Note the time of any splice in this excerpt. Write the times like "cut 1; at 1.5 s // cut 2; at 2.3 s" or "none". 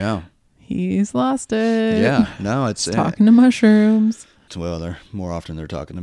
cut 1; at 4.5 s